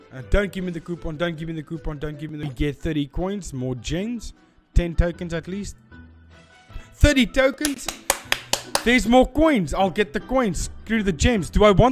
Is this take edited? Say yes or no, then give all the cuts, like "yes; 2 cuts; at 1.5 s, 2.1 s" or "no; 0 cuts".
yes; 1 cut; at 2.5 s